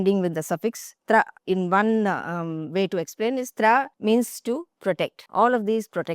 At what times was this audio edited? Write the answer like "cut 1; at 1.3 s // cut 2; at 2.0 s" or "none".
cut 1; at 1.4 s // cut 2; at 3.9 s // cut 3; at 5.2 s

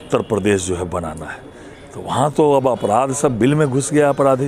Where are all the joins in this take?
none

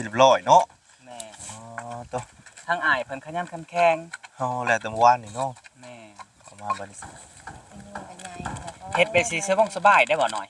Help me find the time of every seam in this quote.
cut 1; at 7.0 s

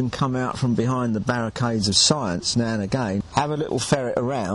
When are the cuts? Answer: cut 1; at 3.2 s

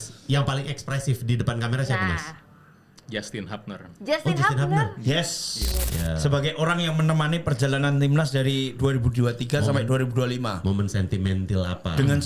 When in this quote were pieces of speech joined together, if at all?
cut 1; at 5.8 s

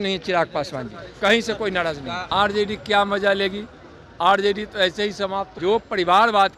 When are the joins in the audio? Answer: cut 1; at 2.2 s // cut 2; at 5.5 s

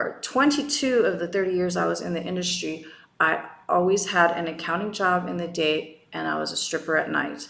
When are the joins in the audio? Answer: none

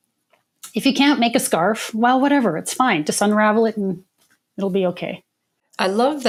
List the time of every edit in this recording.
none

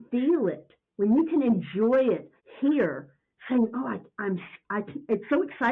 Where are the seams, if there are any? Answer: none

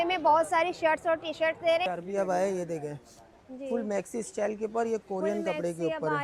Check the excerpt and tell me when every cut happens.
cut 1; at 1.8 s

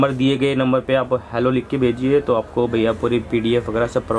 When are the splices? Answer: none

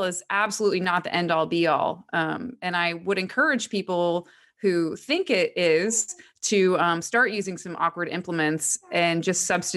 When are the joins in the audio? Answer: none

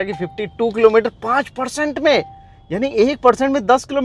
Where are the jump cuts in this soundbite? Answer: none

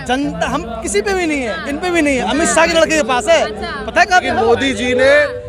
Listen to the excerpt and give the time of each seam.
cut 1; at 4.2 s

